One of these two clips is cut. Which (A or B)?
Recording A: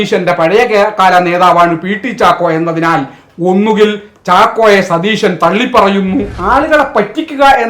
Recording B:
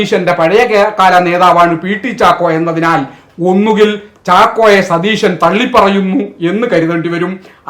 A